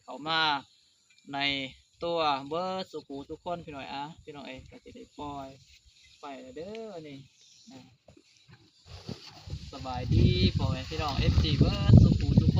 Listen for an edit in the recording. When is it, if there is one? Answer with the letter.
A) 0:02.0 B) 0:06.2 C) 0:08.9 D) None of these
C